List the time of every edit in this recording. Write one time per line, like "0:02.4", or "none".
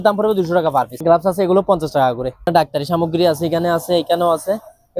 0:00.9
0:02.5